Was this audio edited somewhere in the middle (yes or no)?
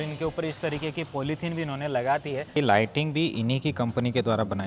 yes